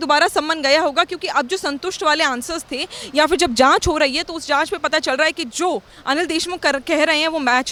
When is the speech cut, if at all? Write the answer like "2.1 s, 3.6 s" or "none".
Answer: none